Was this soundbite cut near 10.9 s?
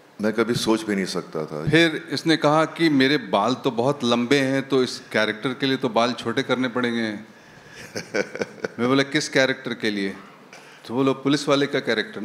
no; 1 cut; at 1.6 s

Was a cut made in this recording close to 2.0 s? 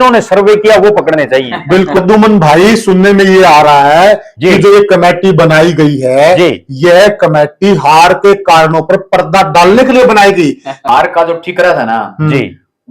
yes; 2 cuts; at 2.0 s, 10.7 s

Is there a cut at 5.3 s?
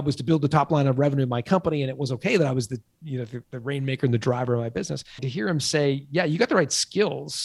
yes; 1 cut; at 5.3 s

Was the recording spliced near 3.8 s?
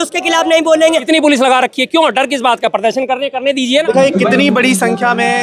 yes; 2 cuts; at 1.0 s, 3.8 s

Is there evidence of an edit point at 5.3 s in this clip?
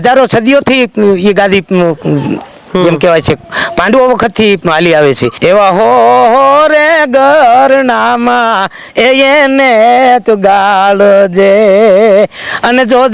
yes; 1 cut; at 5.3 s

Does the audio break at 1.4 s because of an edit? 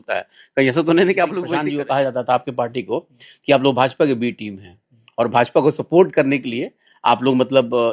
yes; 1 cut; at 1.4 s

